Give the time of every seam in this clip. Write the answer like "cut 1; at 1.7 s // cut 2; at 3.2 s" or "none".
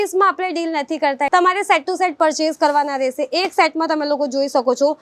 cut 1; at 1.3 s